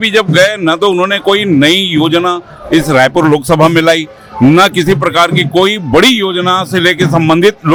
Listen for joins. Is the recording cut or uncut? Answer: uncut